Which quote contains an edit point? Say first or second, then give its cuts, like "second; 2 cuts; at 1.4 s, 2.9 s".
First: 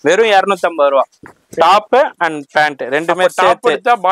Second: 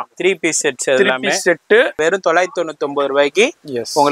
second; 1 cut; at 2.0 s